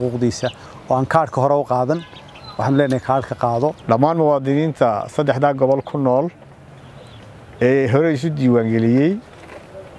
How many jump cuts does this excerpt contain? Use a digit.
1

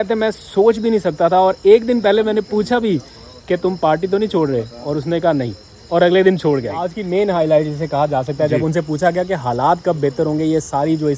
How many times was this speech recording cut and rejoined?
1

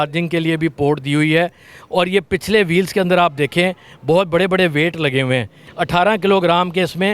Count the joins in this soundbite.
1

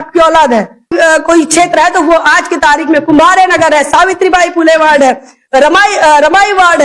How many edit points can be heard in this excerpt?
1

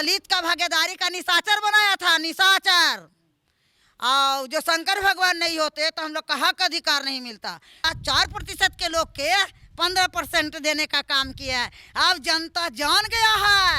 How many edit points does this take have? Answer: 1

